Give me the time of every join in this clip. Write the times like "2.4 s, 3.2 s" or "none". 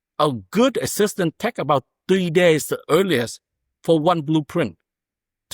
none